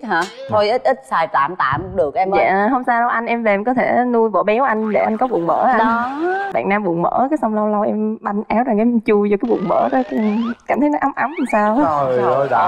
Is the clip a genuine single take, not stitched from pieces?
no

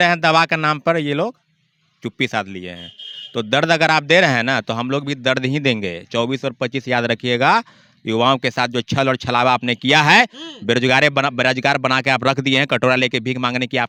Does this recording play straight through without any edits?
yes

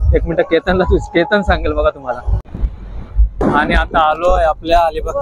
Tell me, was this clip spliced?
yes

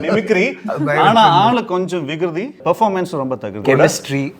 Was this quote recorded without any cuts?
no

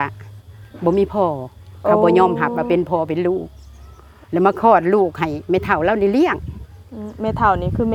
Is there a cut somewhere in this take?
no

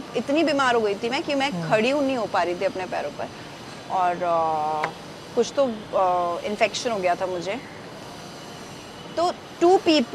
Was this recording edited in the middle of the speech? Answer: no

